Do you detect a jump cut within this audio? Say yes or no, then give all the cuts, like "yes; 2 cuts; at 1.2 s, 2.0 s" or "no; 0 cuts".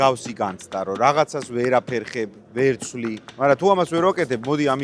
yes; 1 cut; at 3.3 s